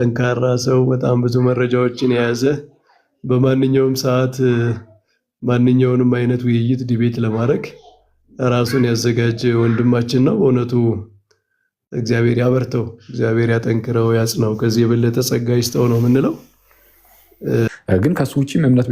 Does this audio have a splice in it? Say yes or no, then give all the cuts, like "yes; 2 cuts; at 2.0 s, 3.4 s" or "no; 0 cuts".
yes; 1 cut; at 17.7 s